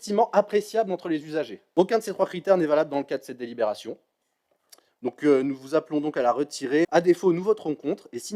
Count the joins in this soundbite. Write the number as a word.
two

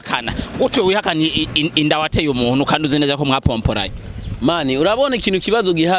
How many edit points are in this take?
zero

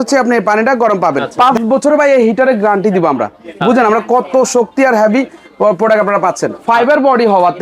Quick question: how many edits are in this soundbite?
two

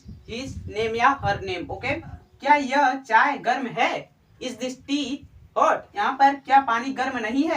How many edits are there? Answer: two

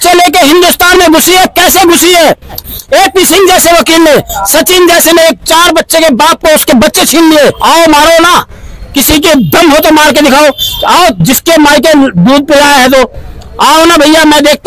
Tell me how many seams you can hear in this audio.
two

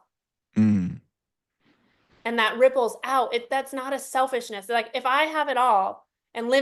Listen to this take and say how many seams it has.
zero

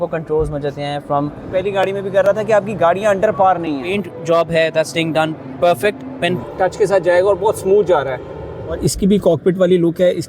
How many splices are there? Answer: four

